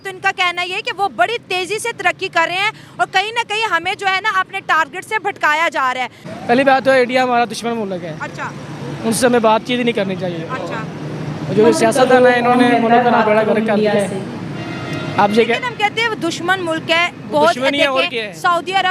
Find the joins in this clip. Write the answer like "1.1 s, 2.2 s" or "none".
6.2 s